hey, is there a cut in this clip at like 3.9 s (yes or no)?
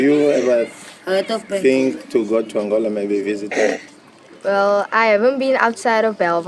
no